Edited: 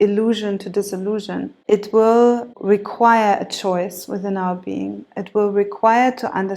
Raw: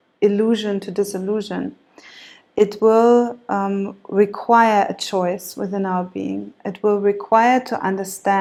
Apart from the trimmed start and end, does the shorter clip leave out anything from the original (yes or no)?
yes